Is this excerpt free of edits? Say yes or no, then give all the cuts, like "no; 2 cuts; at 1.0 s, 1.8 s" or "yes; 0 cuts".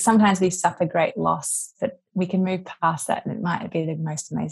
yes; 0 cuts